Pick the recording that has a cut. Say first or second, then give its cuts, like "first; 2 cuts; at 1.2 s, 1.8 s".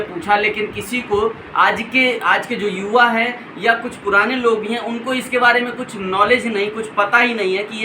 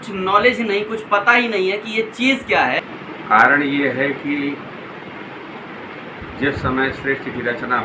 second; 1 cut; at 2.9 s